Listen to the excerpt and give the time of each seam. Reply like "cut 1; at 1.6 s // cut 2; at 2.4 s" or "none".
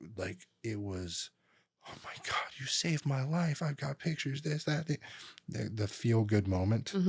none

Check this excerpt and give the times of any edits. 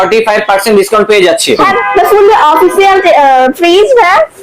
cut 1; at 1.7 s

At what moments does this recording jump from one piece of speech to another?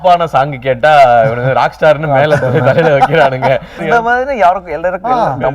cut 1; at 3.8 s

